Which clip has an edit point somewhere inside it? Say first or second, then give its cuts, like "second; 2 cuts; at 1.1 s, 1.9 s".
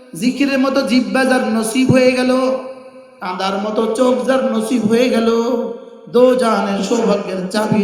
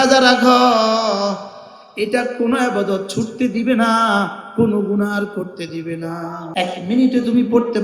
second; 1 cut; at 6.4 s